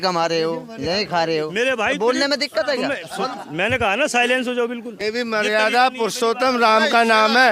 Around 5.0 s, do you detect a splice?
yes; 1 cut; at 5.0 s

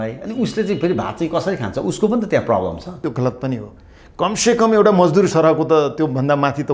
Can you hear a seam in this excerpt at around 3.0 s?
yes; 1 cut; at 3.0 s

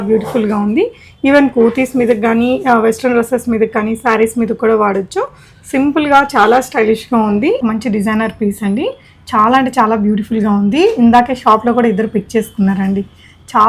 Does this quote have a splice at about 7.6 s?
yes; 1 cut; at 7.6 s

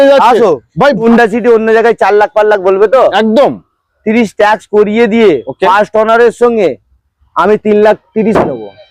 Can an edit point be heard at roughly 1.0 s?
yes; 1 cut; at 1.0 s

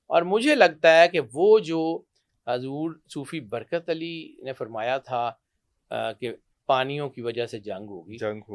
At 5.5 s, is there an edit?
no; 0 cuts

